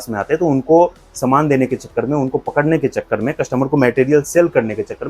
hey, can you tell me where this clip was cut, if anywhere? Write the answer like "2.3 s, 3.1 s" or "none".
none